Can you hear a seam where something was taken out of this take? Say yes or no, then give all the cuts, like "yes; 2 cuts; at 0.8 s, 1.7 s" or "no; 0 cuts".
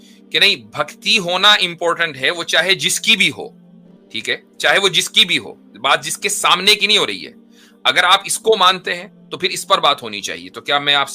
no; 0 cuts